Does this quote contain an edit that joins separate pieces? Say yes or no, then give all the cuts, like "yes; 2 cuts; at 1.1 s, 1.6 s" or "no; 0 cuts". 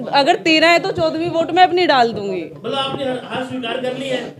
no; 0 cuts